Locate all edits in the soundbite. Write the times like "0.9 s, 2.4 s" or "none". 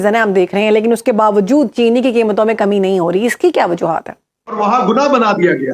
4.5 s